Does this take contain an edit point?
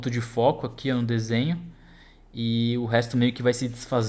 no; 0 cuts

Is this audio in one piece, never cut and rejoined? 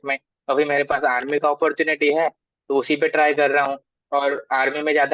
yes; 0 cuts

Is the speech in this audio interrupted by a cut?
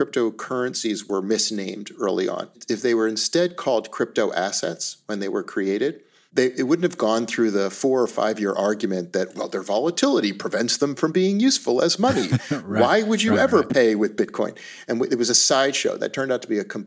yes; 1 cut; at 2.6 s

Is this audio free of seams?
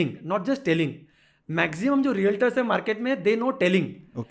yes; 0 cuts

